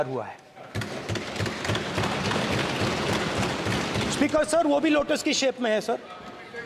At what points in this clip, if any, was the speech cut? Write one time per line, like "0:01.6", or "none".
none